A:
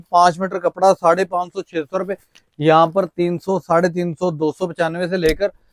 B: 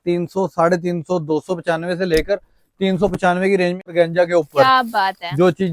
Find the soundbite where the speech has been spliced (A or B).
B